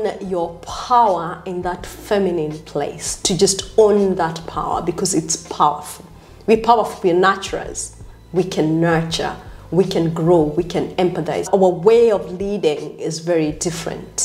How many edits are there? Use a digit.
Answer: 1